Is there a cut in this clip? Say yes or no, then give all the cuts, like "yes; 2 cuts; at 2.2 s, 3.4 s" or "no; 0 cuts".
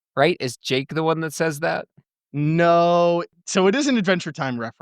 yes; 1 cut; at 3.4 s